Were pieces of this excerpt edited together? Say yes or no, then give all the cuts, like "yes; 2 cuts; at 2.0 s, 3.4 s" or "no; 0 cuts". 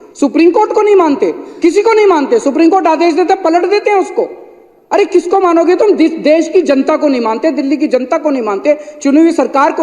no; 0 cuts